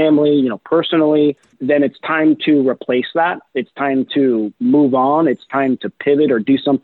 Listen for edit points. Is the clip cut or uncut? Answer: cut